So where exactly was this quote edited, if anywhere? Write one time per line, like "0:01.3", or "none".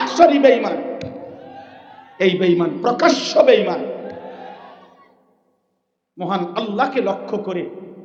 none